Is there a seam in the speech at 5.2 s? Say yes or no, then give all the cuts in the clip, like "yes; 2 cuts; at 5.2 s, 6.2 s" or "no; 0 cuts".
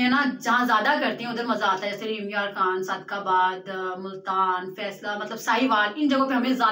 no; 0 cuts